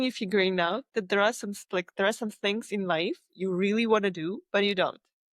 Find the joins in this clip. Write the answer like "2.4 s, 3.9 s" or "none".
none